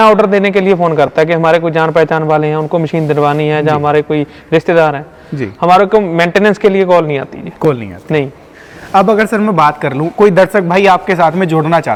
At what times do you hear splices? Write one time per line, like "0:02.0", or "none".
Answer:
none